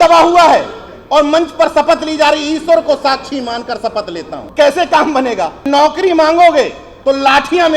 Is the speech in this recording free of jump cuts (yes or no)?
no